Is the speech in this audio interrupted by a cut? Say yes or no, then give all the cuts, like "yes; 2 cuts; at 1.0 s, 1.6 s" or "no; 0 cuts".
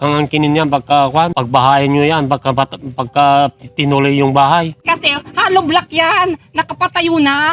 yes; 2 cuts; at 1.4 s, 4.8 s